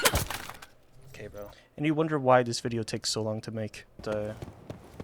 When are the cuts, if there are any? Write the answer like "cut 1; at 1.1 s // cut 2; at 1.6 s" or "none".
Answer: cut 1; at 1.6 s // cut 2; at 4.0 s